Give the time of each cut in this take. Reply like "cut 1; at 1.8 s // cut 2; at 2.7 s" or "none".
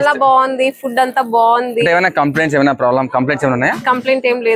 none